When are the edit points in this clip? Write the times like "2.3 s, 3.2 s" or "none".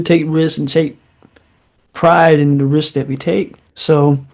none